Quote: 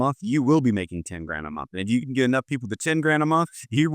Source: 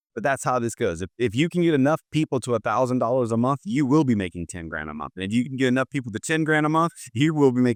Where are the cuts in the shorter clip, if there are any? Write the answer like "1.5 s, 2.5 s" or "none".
none